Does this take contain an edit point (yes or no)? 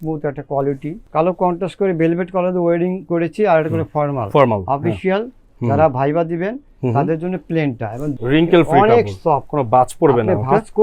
yes